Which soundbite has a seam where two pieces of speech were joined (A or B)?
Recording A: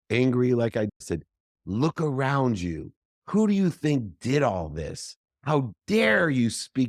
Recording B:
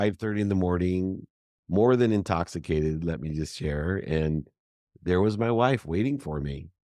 A